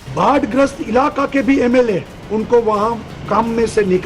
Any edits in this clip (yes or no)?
yes